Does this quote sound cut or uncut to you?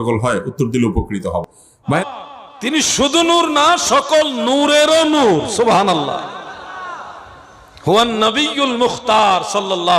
cut